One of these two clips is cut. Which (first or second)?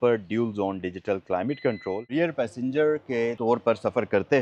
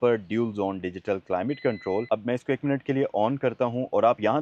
first